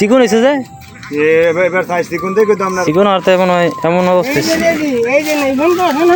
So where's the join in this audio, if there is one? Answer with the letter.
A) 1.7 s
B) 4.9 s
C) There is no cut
C